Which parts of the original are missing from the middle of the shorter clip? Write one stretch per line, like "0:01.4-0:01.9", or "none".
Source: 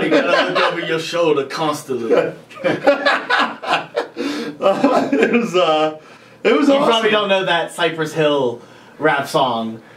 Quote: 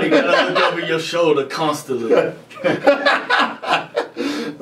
none